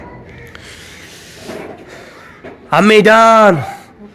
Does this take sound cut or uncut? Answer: uncut